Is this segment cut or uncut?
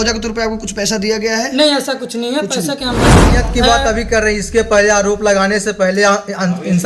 cut